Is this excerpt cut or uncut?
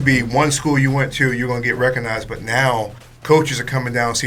uncut